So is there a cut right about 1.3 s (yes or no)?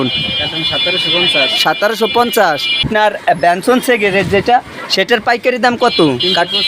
no